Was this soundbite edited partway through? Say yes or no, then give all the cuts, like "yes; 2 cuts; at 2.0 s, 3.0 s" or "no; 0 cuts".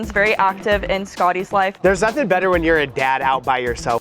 yes; 1 cut; at 1.8 s